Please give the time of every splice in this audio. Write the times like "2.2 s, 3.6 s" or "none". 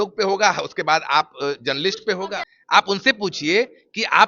2.5 s

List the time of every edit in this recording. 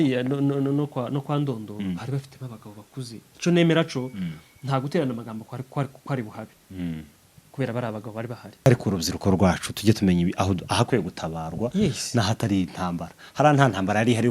8.7 s

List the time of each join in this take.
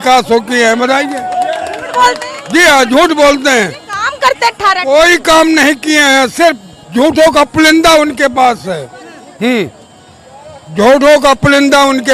none

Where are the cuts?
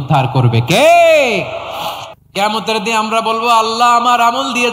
2.1 s

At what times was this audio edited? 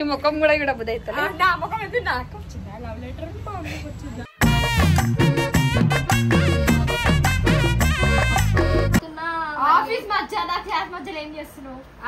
9.1 s

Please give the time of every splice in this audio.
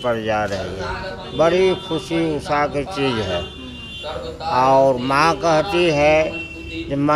none

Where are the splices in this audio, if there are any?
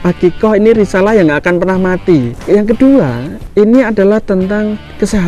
2.4 s

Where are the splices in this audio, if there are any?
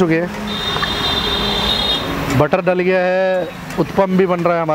none

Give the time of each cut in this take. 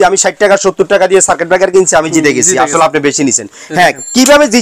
none

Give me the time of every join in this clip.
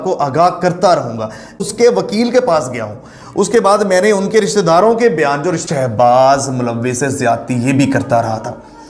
1.6 s, 5.6 s

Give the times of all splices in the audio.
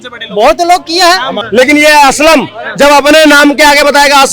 1.4 s

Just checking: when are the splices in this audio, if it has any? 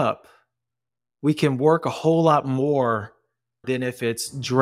3.6 s

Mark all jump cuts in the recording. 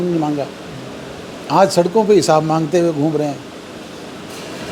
none

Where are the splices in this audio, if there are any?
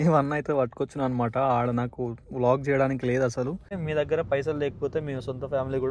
3.7 s

